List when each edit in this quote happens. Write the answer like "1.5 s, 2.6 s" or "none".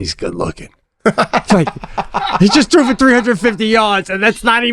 none